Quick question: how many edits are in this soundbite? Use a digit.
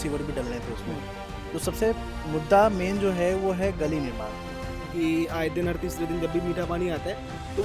1